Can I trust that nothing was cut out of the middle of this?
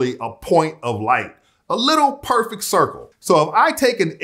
no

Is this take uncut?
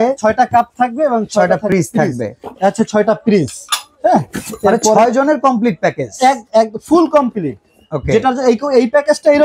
yes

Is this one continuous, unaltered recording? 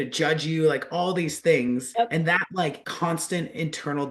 no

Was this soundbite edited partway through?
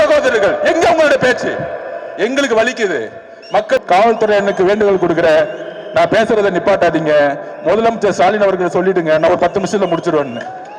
yes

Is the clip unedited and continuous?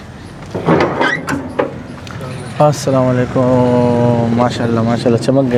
yes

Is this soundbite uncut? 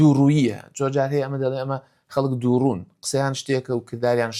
yes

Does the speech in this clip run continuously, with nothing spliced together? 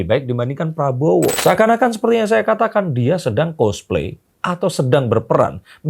no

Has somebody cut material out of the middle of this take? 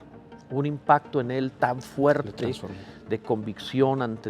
no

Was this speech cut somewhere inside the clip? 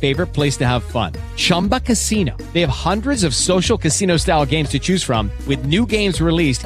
no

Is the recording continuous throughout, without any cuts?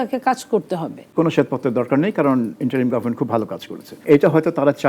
no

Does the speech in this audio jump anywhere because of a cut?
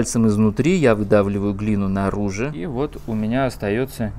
yes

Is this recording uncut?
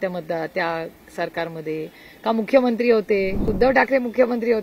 no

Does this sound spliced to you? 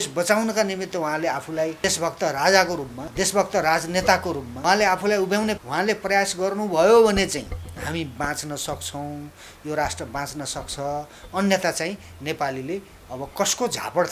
yes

